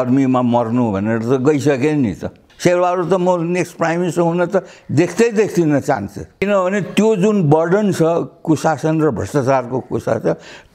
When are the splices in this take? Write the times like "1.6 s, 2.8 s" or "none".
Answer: 2.4 s, 6.4 s